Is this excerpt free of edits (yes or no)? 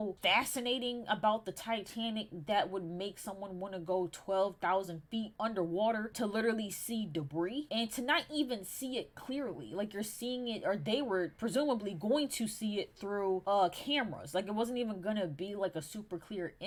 yes